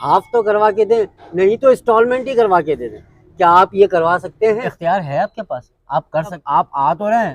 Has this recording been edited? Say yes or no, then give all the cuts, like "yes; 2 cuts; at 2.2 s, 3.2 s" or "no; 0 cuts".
yes; 2 cuts; at 4.7 s, 6.4 s